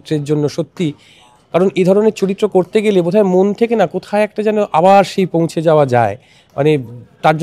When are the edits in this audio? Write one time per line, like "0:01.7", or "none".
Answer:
none